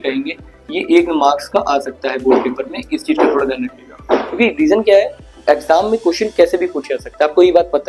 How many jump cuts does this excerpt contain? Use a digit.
0